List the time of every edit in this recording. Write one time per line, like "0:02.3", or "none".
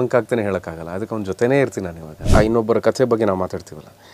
0:02.1